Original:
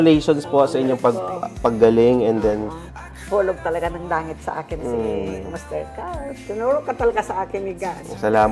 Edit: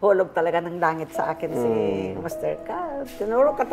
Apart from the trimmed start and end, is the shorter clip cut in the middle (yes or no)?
no